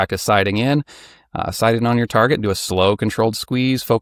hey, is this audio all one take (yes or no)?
yes